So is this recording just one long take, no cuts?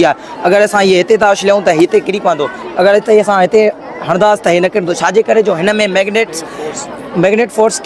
yes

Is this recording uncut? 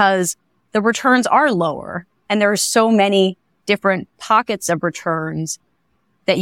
yes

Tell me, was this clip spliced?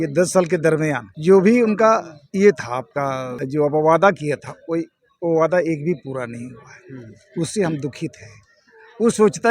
yes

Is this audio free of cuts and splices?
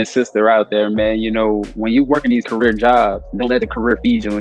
no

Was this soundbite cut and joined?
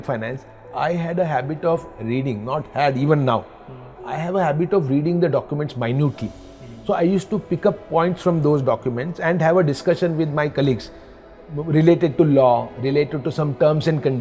no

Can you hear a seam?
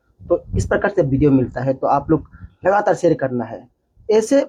no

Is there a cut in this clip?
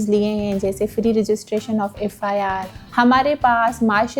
yes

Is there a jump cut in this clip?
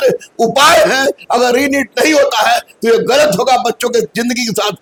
no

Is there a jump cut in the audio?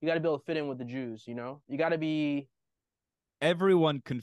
no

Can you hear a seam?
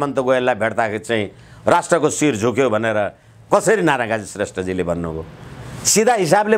no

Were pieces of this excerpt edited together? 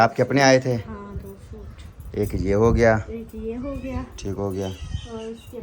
no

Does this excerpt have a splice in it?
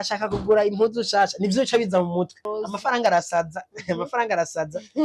yes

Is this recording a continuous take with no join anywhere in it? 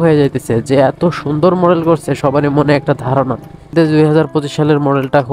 no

